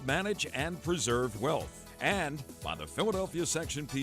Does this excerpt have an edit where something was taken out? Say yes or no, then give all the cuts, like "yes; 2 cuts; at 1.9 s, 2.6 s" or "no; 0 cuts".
yes; 1 cut; at 1.8 s